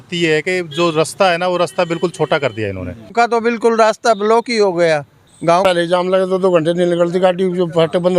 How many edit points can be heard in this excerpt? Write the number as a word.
two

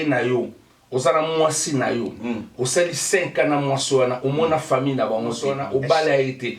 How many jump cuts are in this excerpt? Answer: one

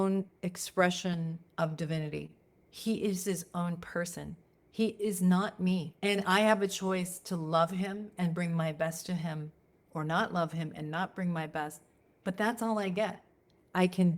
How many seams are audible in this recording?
two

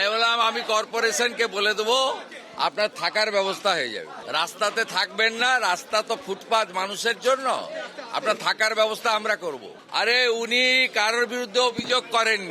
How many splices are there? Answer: two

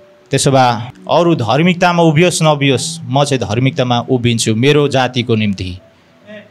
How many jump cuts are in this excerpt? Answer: one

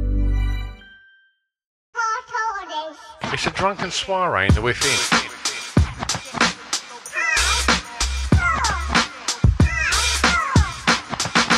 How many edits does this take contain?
one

